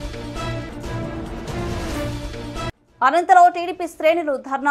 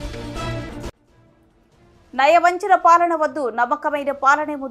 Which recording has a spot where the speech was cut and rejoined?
first; 2 cuts; at 0.8 s, 2.1 s

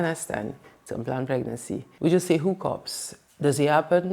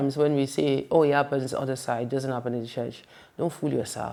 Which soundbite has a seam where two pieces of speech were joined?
first; 1 cut; at 1.9 s

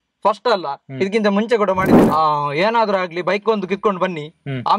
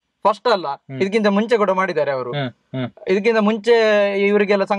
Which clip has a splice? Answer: first; 1 cut; at 2.0 s

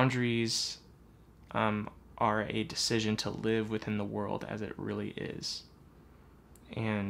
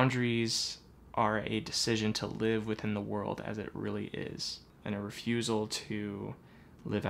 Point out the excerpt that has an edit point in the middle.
second; 2 cuts; at 1.0 s, 4.7 s

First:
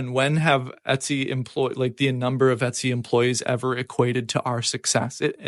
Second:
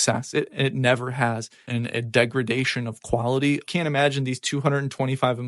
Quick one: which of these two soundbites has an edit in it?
second; 2 cuts; at 1.6 s, 3.6 s

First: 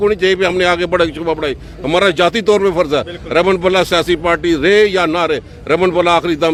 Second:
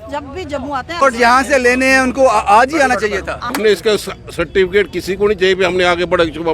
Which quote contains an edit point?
second; 2 cuts; at 1.0 s, 3.4 s

